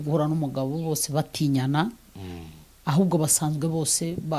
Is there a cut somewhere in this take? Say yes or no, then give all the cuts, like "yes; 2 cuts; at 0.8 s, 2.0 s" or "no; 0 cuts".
no; 0 cuts